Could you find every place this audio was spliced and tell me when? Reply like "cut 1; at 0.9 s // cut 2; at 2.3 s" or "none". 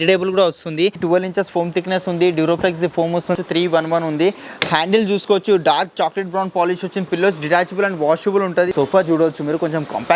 cut 1; at 1.0 s // cut 2; at 3.4 s // cut 3; at 8.7 s